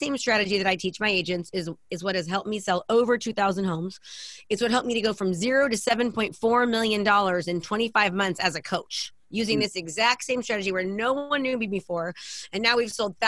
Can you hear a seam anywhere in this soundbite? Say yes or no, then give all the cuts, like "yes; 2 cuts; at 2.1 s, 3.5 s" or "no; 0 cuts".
no; 0 cuts